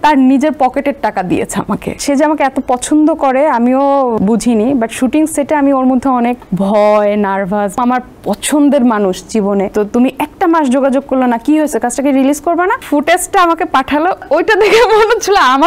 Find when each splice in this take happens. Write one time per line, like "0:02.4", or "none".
0:01.9
0:04.2
0:06.4
0:07.8
0:09.7
0:12.8
0:14.2